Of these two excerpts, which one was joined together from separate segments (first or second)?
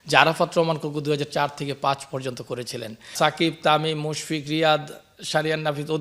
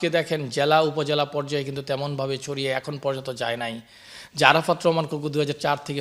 first